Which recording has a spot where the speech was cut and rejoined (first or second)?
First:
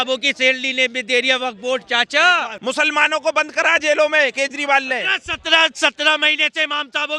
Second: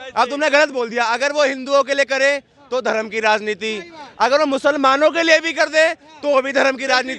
first